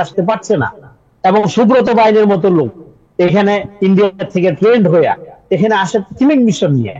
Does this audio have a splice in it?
no; 0 cuts

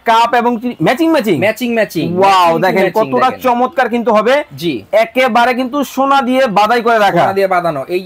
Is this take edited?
no; 0 cuts

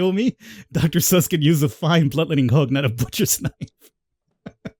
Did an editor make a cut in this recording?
no; 0 cuts

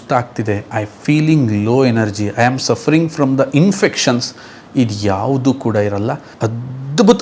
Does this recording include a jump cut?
yes; 1 cut; at 6.3 s

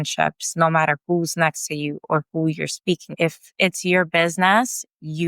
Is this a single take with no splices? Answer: no; 1 cut; at 3.1 s

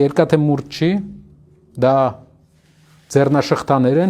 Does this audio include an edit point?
no; 0 cuts

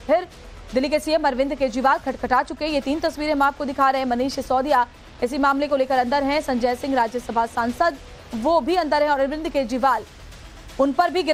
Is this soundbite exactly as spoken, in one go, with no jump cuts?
yes; 0 cuts

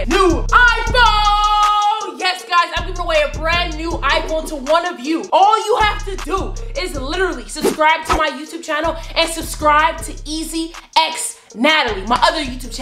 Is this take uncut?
yes; 0 cuts

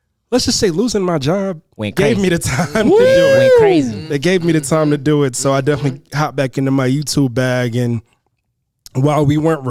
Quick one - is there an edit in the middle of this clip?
no; 0 cuts

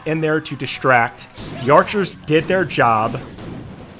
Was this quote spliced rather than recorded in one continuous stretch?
no; 0 cuts

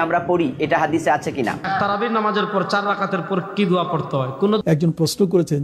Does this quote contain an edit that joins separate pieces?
yes; 2 cuts; at 1.6 s, 4.6 s

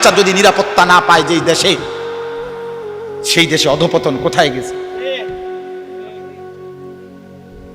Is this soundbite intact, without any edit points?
yes; 0 cuts

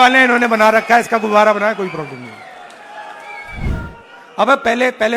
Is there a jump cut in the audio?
yes; 1 cut; at 3.7 s

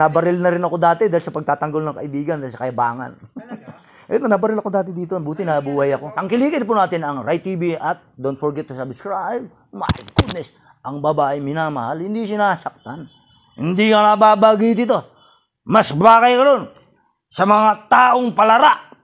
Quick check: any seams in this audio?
yes; 1 cut; at 6.1 s

